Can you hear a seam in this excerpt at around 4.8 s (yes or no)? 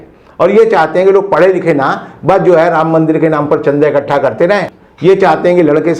yes